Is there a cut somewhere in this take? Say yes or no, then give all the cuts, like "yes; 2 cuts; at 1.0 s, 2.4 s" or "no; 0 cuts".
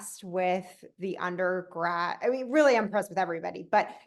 no; 0 cuts